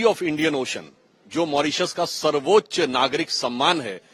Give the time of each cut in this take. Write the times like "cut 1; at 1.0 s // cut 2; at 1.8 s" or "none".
none